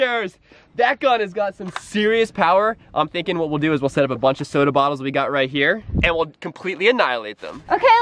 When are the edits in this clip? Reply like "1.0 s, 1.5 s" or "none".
5.9 s